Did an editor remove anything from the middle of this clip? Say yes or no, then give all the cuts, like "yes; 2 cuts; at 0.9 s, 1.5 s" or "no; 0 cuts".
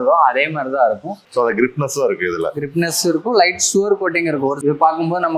yes; 2 cuts; at 1.2 s, 4.6 s